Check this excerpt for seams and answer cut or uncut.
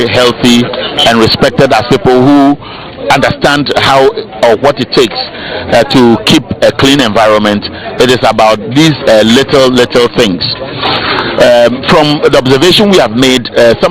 uncut